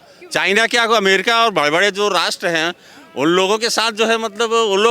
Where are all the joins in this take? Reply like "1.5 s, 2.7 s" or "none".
none